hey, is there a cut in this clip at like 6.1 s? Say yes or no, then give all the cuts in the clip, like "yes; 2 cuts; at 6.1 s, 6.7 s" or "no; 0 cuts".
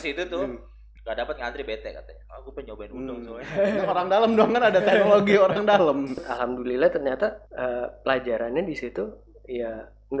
yes; 1 cut; at 6.1 s